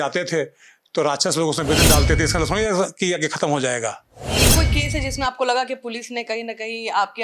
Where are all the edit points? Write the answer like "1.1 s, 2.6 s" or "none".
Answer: 4.5 s